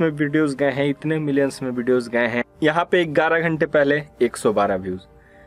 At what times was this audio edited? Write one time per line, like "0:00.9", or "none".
0:02.5